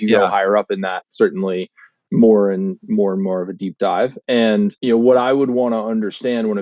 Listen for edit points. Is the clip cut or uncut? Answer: cut